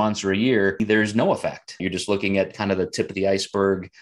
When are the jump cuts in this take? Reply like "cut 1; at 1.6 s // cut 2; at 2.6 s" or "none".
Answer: cut 1; at 0.8 s // cut 2; at 1.8 s